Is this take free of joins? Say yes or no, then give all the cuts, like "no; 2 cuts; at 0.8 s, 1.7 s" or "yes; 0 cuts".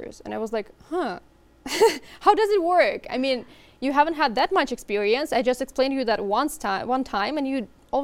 yes; 0 cuts